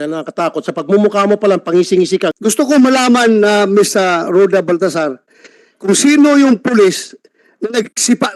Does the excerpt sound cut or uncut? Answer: cut